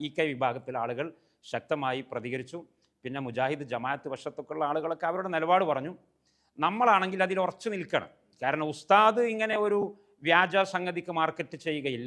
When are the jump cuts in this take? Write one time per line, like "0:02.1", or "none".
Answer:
none